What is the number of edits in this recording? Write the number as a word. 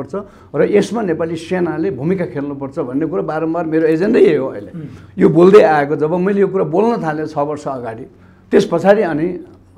zero